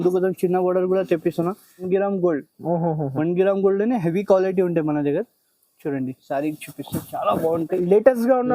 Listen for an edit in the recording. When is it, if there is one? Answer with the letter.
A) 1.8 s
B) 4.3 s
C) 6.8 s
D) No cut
A